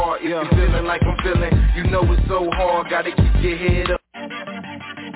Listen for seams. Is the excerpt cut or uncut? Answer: cut